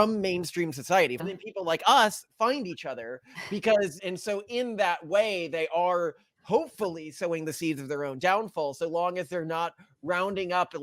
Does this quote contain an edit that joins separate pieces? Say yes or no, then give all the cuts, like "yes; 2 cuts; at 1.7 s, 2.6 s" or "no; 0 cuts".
yes; 2 cuts; at 1.2 s, 4.0 s